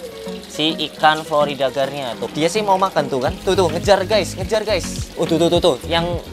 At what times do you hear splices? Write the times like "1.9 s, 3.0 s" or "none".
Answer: 2.3 s, 5.0 s